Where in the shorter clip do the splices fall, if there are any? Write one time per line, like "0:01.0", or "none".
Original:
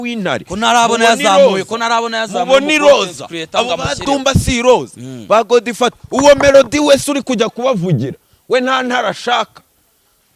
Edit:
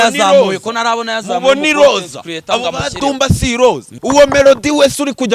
0:03.9